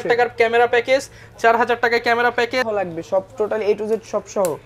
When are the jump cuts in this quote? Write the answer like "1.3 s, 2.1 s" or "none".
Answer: 2.7 s

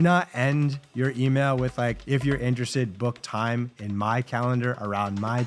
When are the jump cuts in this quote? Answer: 2.0 s

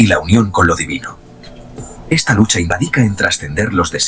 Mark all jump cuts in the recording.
2.7 s

